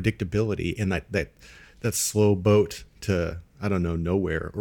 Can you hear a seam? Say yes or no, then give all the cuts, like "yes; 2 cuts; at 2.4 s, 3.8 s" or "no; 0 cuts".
no; 0 cuts